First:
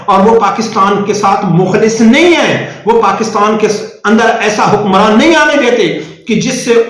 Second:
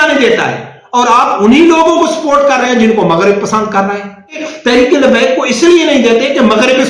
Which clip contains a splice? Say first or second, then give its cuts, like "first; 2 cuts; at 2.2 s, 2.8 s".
second; 1 cut; at 4.4 s